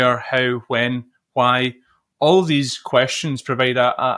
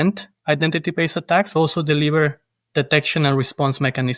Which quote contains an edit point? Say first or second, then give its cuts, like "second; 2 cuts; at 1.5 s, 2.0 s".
second; 1 cut; at 1.5 s